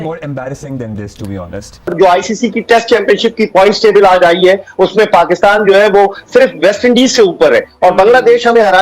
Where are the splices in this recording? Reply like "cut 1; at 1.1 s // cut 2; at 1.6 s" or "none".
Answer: cut 1; at 1.8 s